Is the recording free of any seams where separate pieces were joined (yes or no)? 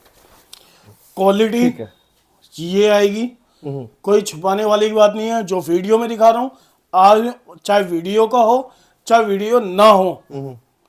yes